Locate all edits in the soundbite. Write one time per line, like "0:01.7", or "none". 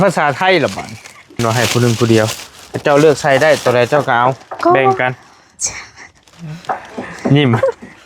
0:01.3